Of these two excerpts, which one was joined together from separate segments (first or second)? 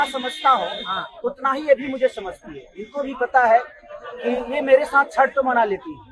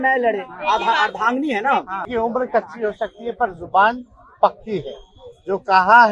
second